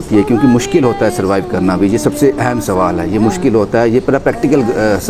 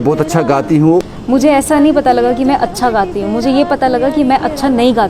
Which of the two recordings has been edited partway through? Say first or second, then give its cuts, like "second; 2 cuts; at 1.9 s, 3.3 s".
second; 1 cut; at 1.0 s